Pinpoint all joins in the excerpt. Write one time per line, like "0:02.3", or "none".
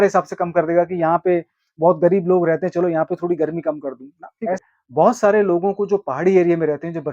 0:04.6